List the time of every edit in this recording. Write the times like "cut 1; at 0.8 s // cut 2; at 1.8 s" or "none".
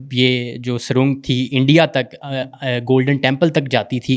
none